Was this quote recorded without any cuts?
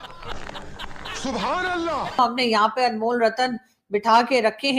no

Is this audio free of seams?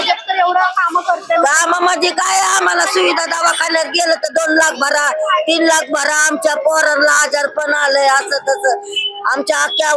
yes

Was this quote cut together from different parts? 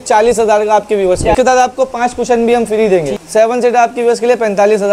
yes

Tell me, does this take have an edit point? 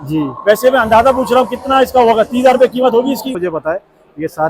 yes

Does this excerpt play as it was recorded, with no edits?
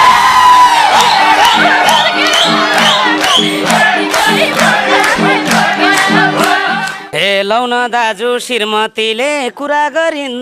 no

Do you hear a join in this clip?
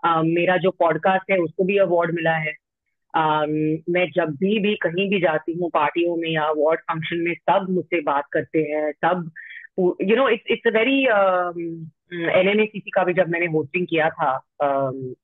no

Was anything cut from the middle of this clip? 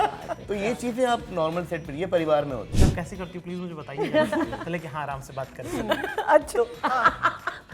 yes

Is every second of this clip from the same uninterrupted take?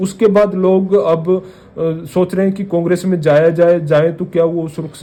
yes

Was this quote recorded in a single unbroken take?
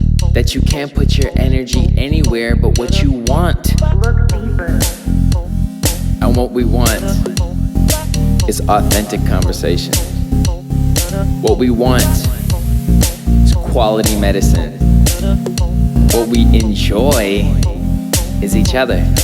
yes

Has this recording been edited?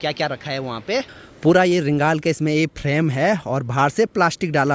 no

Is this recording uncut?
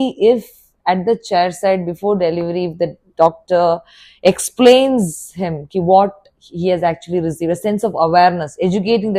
yes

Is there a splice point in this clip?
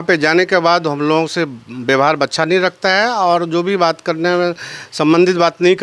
no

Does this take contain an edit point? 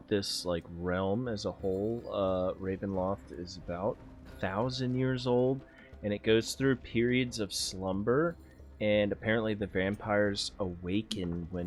no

